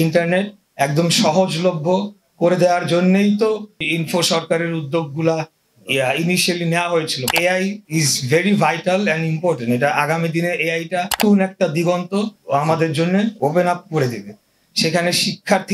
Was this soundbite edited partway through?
yes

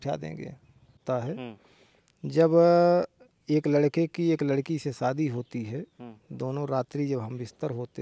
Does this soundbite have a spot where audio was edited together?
yes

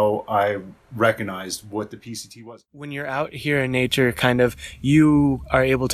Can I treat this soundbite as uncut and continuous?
no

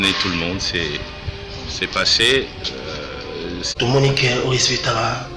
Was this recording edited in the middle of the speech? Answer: yes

